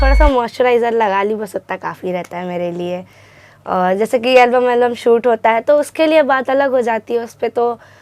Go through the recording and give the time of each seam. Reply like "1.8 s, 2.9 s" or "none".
none